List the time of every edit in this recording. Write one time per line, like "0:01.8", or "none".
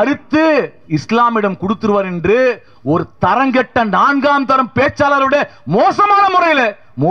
none